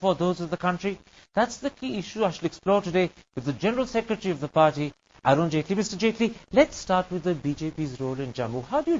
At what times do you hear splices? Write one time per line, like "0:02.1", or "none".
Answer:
none